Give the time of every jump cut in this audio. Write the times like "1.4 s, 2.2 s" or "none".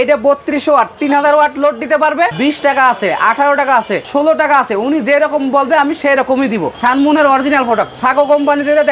2.3 s, 6.7 s